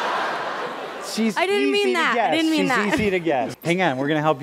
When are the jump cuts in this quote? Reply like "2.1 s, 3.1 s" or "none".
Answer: 3.5 s